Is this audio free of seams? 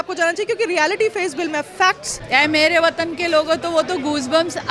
no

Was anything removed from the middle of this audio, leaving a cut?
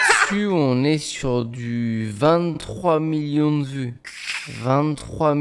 no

